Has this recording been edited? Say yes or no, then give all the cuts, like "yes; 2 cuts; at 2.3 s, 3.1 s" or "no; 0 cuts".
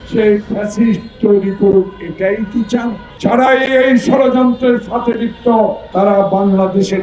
yes; 1 cut; at 3.1 s